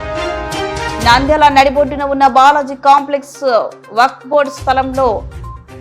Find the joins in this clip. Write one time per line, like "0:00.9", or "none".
0:01.0